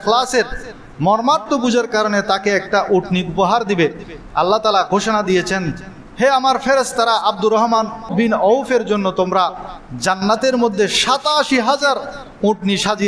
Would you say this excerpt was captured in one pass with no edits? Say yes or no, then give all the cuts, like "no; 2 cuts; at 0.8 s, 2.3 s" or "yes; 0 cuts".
no; 1 cut; at 8.1 s